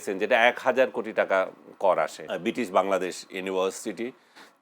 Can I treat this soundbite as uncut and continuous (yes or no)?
no